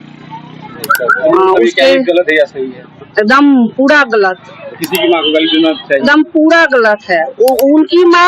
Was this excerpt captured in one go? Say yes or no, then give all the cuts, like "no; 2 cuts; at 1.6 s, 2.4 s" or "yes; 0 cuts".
yes; 0 cuts